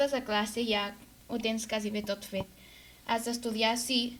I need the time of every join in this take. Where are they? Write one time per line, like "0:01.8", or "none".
none